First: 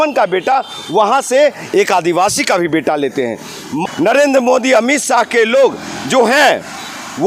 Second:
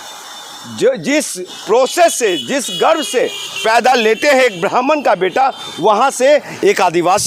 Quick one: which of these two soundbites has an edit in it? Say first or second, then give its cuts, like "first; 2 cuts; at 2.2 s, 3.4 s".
first; 1 cut; at 3.8 s